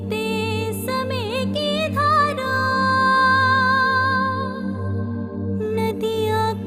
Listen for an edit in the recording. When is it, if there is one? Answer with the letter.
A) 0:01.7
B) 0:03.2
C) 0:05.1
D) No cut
D